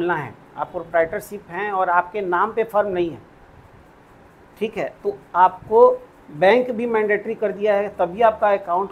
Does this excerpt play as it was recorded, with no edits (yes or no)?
yes